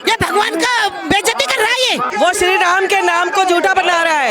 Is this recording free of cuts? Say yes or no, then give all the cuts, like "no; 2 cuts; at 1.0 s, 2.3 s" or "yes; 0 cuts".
no; 1 cut; at 2.1 s